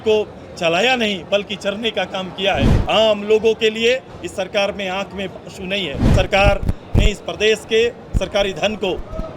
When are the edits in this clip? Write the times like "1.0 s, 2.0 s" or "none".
2.7 s, 6.1 s